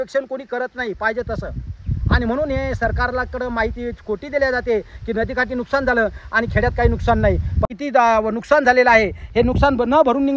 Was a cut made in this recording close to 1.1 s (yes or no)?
no